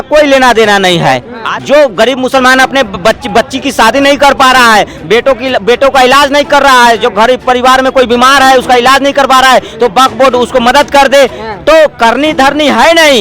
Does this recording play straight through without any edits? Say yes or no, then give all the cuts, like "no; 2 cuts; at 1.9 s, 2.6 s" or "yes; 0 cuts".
no; 1 cut; at 1.4 s